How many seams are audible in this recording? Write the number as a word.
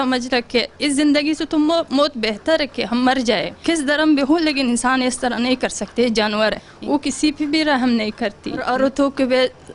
three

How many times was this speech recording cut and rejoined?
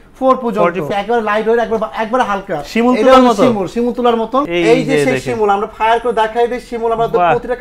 two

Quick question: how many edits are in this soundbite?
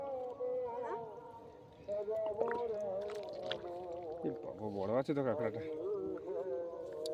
zero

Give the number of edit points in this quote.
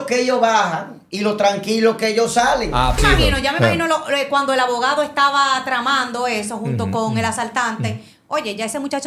one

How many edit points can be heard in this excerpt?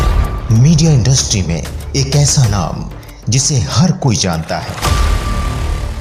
zero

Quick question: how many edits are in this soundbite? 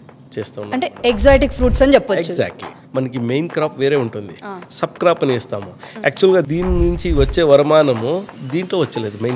three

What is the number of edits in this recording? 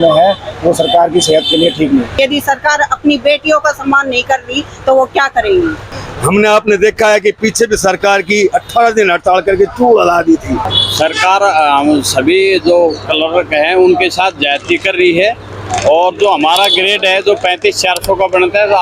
three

